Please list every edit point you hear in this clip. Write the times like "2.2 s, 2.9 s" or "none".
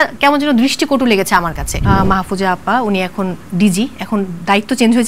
1.8 s

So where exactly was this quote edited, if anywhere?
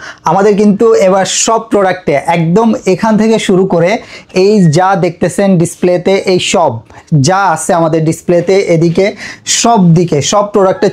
none

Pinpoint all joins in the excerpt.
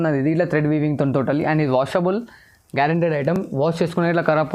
none

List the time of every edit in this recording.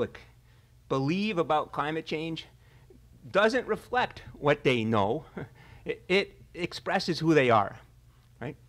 3.4 s

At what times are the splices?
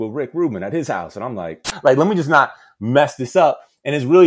1.7 s

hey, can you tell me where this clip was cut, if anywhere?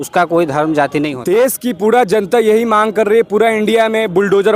1.2 s

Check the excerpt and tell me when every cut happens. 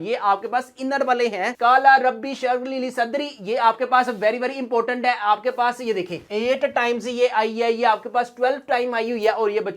1.5 s

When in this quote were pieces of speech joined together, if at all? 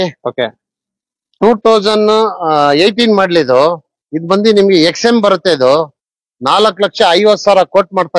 none

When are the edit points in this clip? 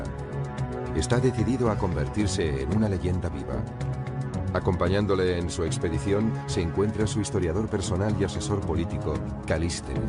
8.6 s

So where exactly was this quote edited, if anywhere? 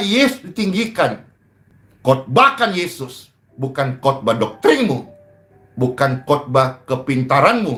none

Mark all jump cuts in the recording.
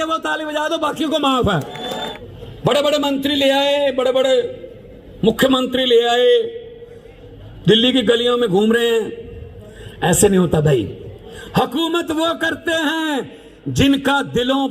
2.0 s

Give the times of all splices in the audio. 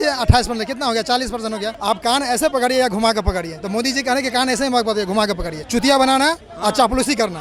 1.8 s, 5.6 s

